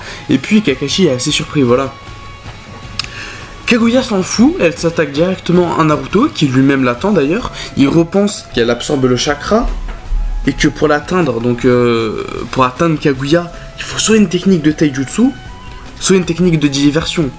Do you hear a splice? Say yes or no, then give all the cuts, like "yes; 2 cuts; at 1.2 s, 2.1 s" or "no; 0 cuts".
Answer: yes; 1 cut; at 5.3 s